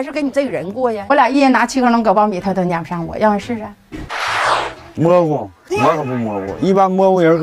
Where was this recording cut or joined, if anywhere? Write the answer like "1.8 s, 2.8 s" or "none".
1.0 s